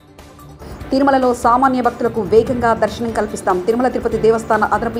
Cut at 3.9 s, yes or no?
no